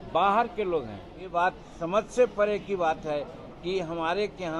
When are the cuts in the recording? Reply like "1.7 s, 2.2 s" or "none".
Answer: 1.2 s

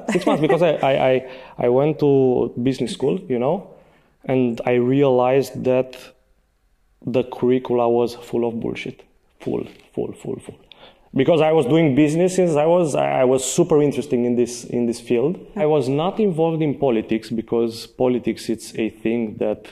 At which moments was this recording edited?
15.6 s

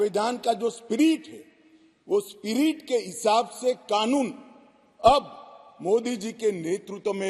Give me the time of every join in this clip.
none

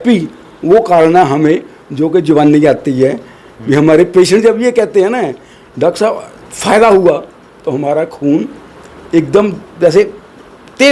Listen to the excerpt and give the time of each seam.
none

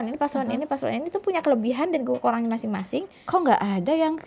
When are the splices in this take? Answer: 3.1 s

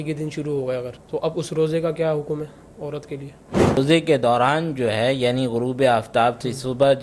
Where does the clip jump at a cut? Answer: 1.0 s, 3.8 s

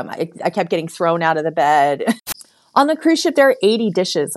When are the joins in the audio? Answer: 2.2 s

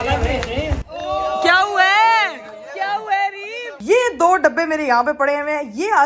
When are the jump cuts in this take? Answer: 3.7 s

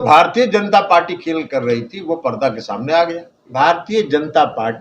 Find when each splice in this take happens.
3.5 s

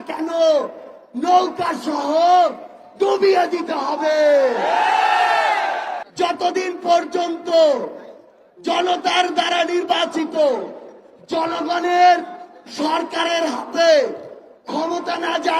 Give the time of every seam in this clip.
6.0 s

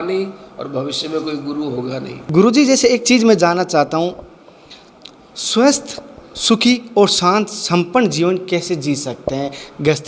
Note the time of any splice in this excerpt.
2.1 s

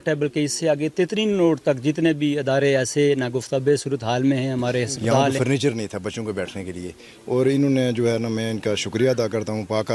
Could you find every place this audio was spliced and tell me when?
5.3 s

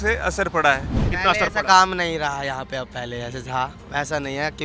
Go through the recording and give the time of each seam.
1.1 s

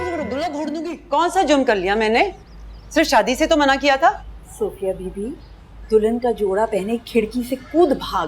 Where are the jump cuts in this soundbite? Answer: 1.0 s

